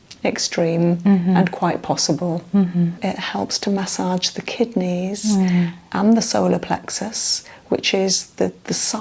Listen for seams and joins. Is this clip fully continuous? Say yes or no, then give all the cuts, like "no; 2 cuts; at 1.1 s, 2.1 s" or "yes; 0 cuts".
no; 1 cut; at 3.0 s